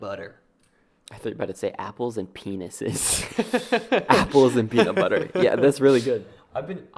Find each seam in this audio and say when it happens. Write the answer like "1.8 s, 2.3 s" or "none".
none